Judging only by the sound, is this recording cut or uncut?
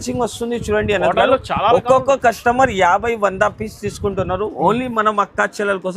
uncut